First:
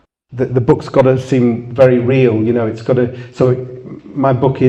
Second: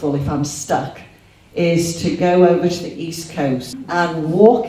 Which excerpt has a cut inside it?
second; 1 cut; at 3.7 s

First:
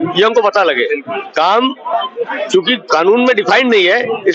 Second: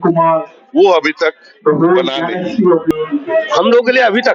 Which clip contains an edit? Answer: second; 1 cut; at 2.9 s

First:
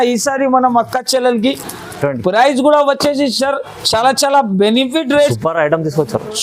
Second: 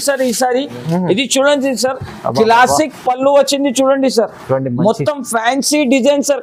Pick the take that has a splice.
first; 1 cut; at 5.4 s

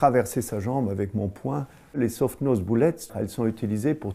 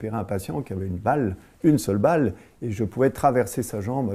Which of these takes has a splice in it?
first; 1 cut; at 3.1 s

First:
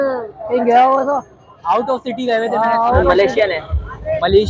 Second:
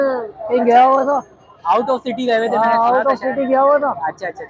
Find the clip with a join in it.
first; 1 cut; at 3.1 s

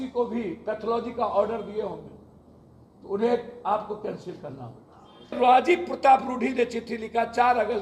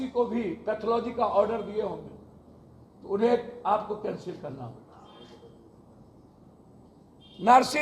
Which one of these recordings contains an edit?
first; 1 cut; at 5.4 s

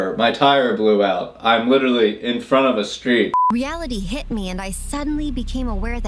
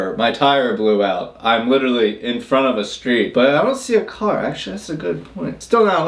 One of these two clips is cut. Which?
first; 1 cut; at 3.3 s

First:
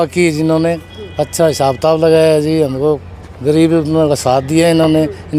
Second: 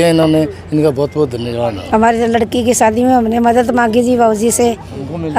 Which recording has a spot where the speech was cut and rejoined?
second; 1 cut; at 1.8 s

